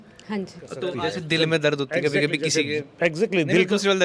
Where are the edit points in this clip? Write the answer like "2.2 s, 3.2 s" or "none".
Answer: 0.9 s